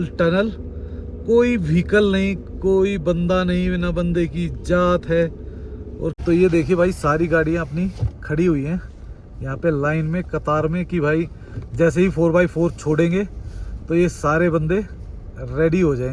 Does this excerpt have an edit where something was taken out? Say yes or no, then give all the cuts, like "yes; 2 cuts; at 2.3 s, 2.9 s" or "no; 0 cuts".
yes; 1 cut; at 6.2 s